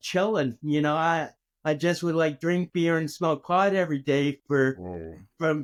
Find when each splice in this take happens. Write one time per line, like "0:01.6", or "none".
none

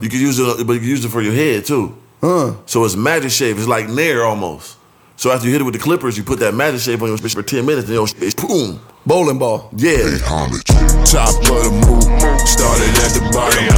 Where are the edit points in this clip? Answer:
0:10.2

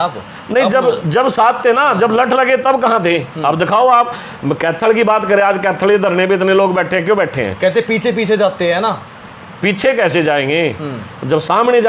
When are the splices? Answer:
none

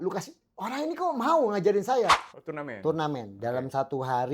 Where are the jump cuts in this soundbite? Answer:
0:02.2

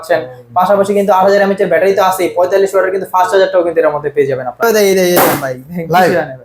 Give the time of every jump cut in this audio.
0:04.6

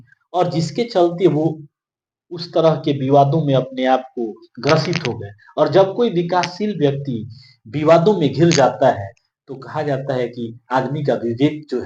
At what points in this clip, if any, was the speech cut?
none

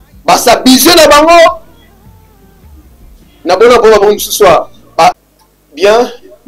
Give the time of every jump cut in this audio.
0:05.2

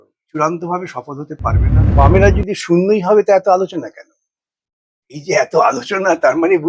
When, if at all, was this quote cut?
0:01.8

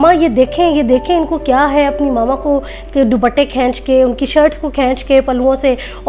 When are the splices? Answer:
none

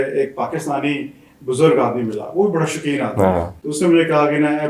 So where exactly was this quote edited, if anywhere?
0:03.6

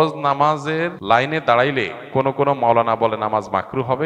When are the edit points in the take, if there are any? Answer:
0:01.0

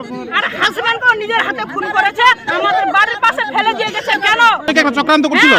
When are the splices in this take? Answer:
0:04.7

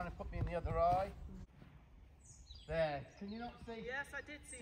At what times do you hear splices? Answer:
0:01.4

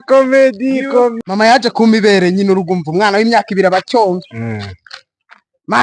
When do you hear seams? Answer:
0:01.1

